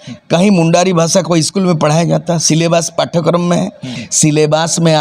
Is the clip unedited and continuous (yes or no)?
no